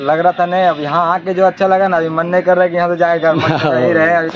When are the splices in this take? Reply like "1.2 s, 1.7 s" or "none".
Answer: none